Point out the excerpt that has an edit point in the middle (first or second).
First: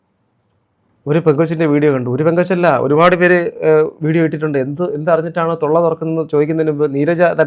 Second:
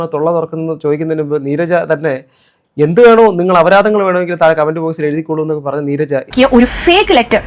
second